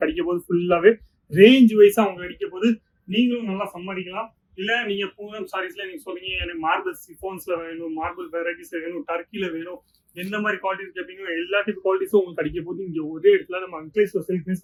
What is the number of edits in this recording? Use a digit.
0